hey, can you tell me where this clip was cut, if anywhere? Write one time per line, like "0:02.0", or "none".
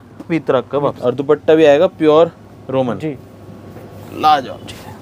0:01.0